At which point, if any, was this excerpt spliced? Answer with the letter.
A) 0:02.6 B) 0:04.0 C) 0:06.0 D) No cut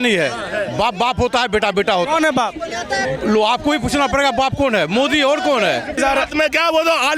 C